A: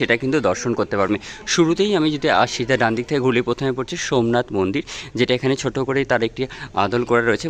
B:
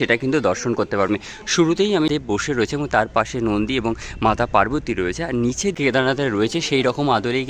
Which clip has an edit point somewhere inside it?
B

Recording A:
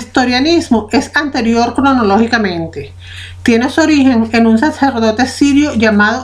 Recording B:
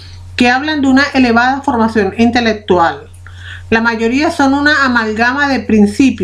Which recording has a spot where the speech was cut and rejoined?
A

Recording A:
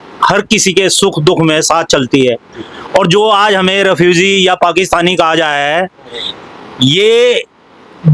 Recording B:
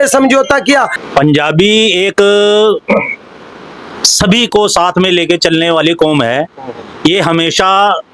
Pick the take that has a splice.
B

